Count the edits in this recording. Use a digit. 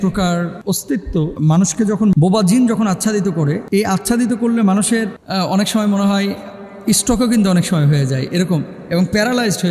3